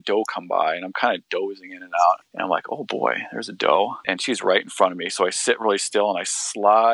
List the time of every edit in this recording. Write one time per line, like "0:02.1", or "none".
0:02.3
0:04.1